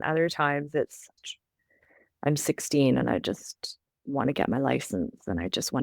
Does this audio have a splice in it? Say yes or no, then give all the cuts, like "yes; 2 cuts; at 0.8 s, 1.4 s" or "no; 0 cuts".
yes; 1 cut; at 1.1 s